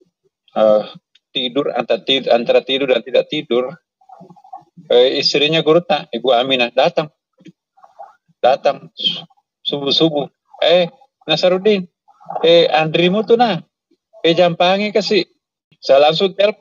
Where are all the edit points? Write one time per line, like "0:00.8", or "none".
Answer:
0:15.7